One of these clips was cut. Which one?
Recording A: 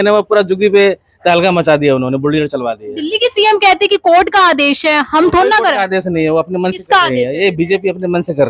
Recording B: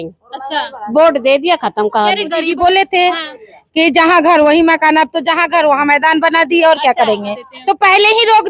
B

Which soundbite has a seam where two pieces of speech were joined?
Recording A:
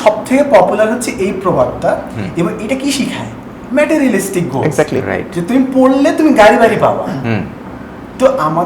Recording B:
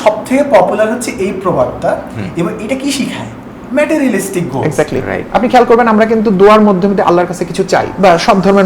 B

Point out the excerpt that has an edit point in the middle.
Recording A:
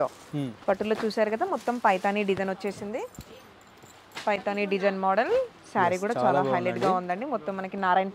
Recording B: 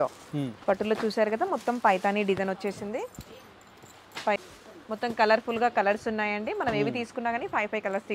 B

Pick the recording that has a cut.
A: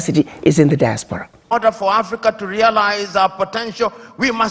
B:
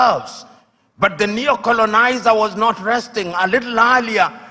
A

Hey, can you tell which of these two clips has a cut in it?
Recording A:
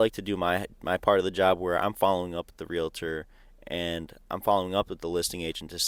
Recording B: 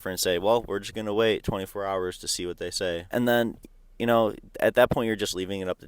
B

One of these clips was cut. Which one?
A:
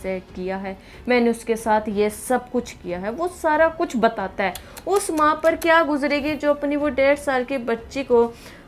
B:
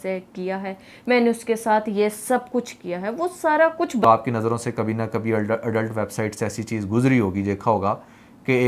B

